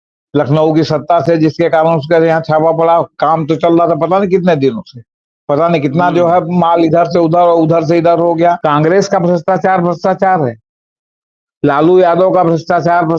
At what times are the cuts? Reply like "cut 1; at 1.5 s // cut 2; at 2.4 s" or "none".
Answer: cut 1; at 8.6 s